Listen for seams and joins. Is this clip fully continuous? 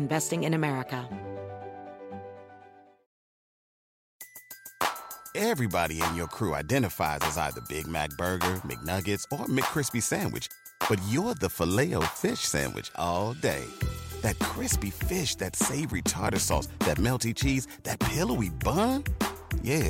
no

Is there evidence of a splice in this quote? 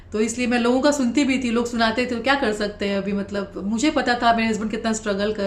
no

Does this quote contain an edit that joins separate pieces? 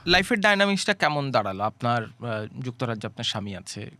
no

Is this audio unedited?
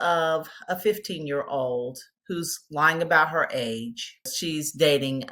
no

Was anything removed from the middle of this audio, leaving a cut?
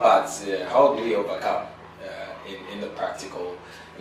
no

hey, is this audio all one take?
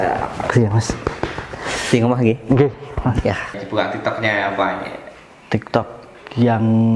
no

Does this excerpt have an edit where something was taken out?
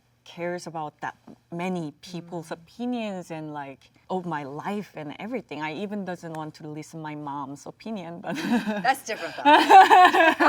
no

